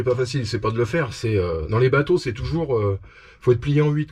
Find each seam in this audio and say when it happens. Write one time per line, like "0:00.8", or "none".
none